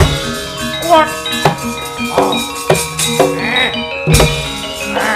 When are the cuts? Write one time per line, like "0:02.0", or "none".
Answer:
none